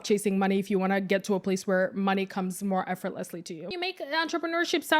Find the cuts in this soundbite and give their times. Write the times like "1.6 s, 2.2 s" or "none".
3.7 s

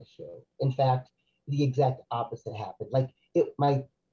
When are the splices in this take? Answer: none

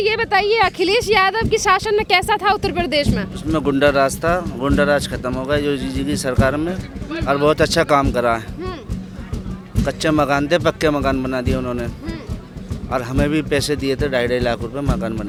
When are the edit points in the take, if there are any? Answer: none

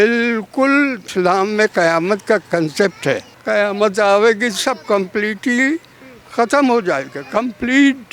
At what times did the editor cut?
1.0 s, 3.3 s

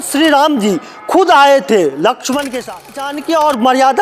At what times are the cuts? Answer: 3.1 s

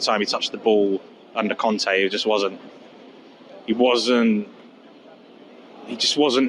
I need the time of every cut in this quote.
none

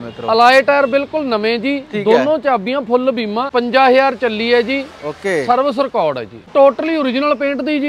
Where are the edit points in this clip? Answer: 3.5 s, 6.5 s

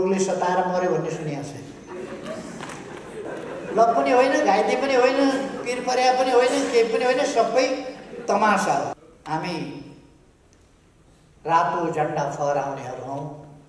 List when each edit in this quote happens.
3.2 s, 9.0 s

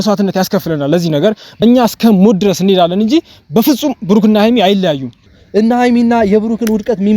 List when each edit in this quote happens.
1.5 s, 5.2 s

